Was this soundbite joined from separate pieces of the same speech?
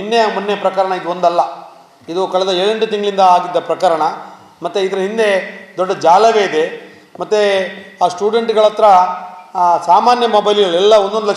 no; 0 cuts

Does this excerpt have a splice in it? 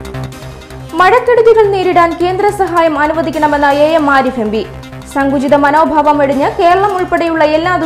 no; 0 cuts

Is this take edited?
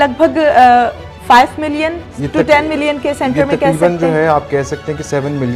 no; 0 cuts

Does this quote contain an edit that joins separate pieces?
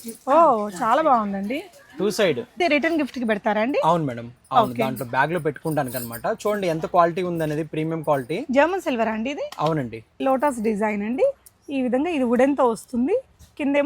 yes; 2 cuts; at 2.6 s, 10.2 s

